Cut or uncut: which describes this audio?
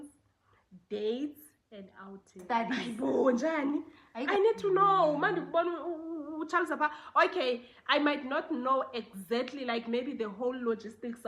cut